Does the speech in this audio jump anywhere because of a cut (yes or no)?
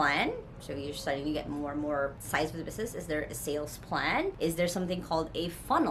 no